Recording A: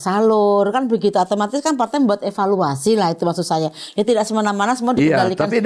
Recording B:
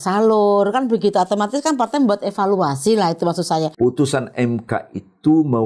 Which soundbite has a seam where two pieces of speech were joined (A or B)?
B